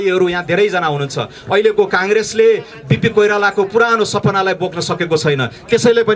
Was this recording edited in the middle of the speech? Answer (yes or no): no